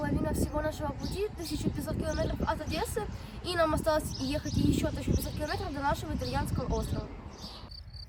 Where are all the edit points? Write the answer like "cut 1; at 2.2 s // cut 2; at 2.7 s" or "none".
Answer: none